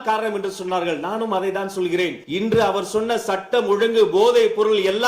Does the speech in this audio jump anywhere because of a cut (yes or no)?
yes